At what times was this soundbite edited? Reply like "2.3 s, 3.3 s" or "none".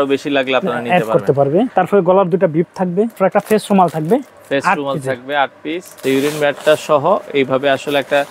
1.7 s, 3.2 s, 6.0 s